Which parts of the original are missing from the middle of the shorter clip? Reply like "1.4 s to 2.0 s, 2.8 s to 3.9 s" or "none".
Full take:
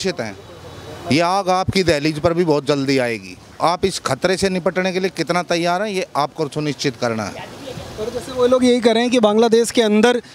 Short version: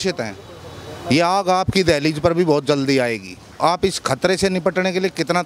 none

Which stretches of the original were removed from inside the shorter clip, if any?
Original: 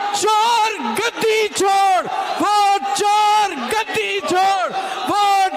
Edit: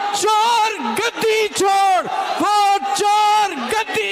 none

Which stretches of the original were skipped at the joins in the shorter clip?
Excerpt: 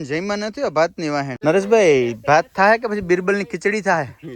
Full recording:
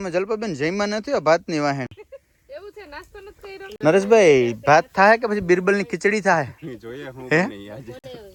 1.8 s to 3.7 s

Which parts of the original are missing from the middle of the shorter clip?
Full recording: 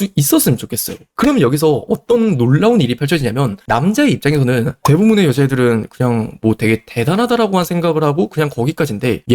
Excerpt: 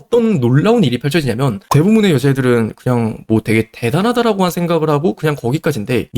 3.6 s to 4.7 s

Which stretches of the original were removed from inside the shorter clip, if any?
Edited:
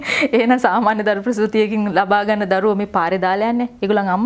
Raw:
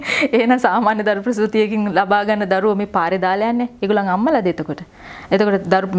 none

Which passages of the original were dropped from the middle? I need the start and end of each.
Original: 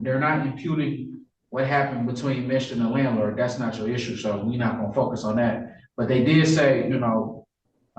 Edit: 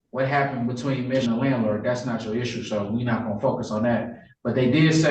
2.6 s to 2.8 s

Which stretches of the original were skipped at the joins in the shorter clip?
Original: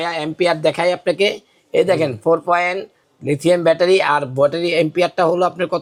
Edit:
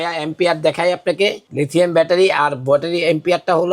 1.4 s to 3.1 s

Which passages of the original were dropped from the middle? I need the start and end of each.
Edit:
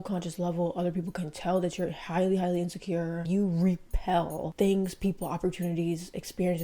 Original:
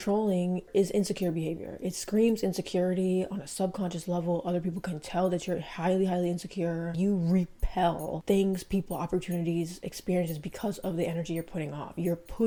none

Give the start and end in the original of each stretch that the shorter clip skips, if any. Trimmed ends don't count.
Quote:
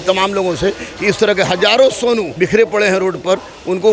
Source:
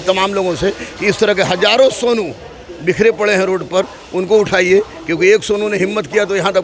2.3 s to 2.8 s

